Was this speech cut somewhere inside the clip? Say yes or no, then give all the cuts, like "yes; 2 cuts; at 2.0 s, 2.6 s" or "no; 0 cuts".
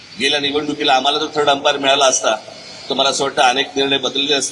no; 0 cuts